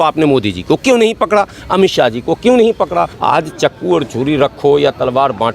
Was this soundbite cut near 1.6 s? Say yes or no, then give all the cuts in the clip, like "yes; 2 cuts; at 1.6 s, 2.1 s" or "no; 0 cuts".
no; 1 cut; at 3.1 s